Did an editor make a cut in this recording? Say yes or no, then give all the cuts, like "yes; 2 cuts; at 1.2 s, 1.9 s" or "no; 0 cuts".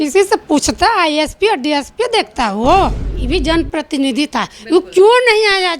yes; 1 cut; at 3.1 s